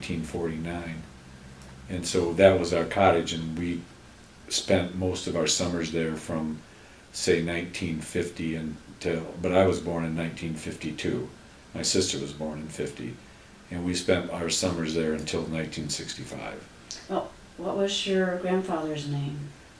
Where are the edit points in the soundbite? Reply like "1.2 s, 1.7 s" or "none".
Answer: 5.8 s

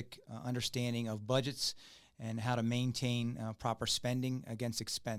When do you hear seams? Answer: none

